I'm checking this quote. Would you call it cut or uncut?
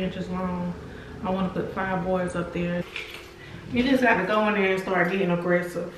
cut